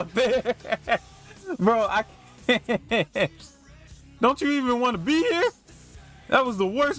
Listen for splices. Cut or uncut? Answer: uncut